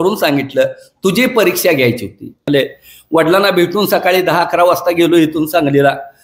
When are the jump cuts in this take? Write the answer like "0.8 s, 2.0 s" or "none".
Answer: 2.5 s